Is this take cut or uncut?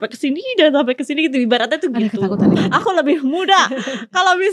cut